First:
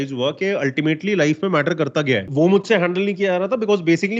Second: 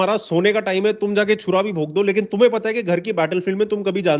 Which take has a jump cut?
first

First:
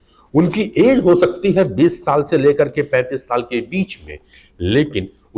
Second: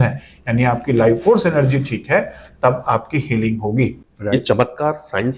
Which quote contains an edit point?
second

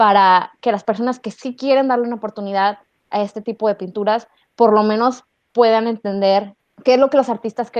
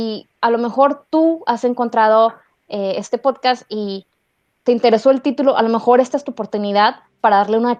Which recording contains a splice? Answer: first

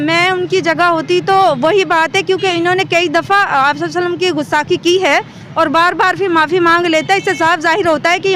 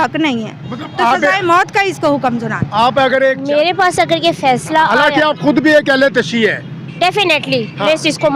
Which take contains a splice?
second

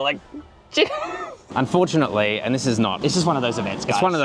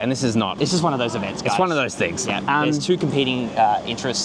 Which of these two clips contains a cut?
first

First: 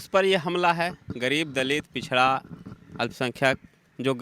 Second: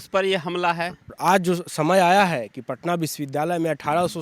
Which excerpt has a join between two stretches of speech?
second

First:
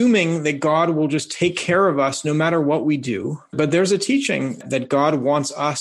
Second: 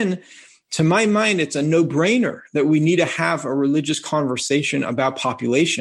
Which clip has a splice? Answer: first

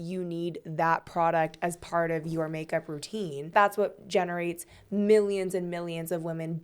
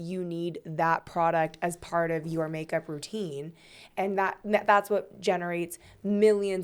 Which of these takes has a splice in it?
first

